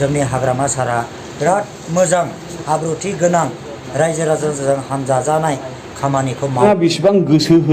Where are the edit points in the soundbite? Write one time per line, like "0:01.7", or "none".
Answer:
0:06.6